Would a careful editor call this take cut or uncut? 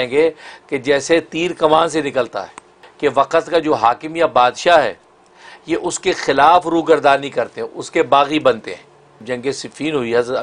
cut